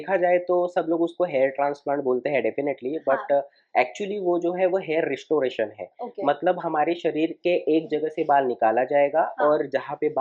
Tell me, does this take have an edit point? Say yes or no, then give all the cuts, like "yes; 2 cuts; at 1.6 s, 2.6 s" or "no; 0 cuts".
no; 0 cuts